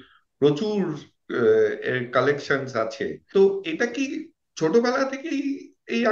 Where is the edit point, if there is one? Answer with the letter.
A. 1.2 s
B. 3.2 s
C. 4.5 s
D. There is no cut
B